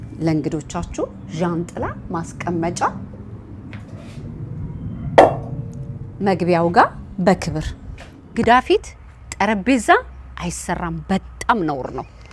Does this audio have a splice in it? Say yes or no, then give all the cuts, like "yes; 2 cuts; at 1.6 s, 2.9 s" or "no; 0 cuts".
yes; 1 cut; at 8.4 s